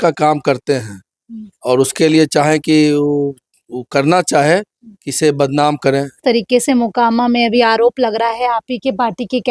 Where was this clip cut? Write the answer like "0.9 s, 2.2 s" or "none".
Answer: 6.2 s